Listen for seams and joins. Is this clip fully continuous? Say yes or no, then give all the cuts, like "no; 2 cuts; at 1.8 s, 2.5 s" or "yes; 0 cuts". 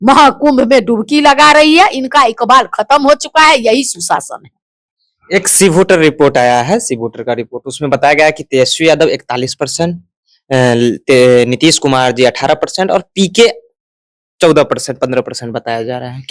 yes; 0 cuts